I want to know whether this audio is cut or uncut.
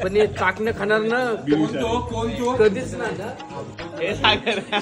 cut